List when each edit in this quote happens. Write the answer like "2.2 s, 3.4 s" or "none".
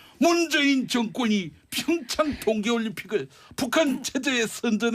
1.0 s